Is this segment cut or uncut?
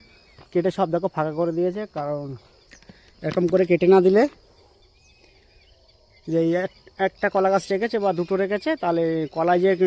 uncut